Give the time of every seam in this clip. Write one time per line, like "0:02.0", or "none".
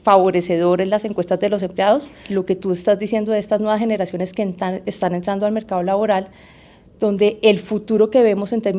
0:02.2